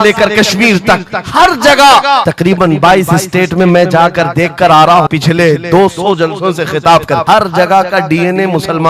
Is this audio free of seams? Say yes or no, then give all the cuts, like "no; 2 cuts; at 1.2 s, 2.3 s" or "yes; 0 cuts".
no; 3 cuts; at 2.3 s, 5.1 s, 7.2 s